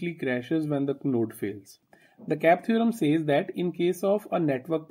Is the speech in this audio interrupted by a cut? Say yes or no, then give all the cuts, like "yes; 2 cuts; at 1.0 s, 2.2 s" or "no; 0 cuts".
yes; 1 cut; at 1.8 s